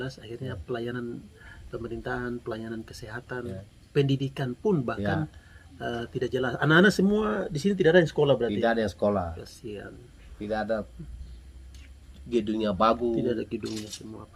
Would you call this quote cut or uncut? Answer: uncut